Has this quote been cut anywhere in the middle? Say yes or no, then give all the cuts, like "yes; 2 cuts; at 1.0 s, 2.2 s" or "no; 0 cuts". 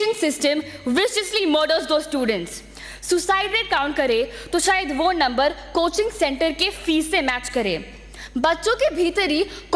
no; 0 cuts